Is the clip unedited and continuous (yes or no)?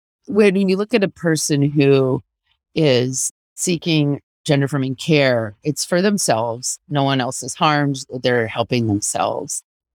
yes